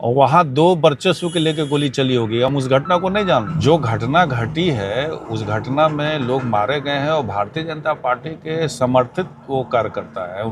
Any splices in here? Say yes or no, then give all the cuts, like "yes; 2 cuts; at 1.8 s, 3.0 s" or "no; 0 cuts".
yes; 1 cut; at 3.5 s